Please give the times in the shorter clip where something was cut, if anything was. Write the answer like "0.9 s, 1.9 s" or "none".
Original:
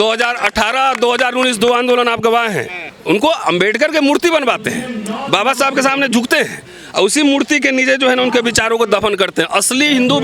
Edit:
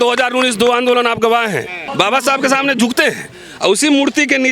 1.8 s